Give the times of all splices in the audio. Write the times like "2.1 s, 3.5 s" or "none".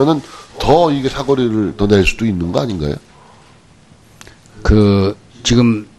4.3 s